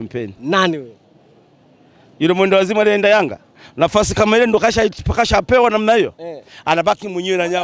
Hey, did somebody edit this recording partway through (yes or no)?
no